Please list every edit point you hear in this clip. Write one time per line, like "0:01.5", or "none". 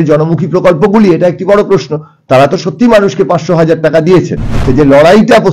0:04.6